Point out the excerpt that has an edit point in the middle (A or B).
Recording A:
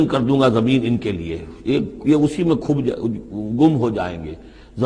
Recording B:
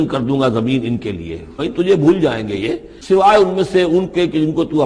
B